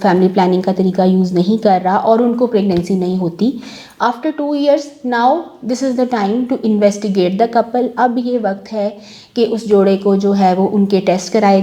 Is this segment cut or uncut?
uncut